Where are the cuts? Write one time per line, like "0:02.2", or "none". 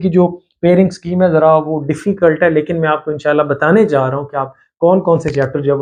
none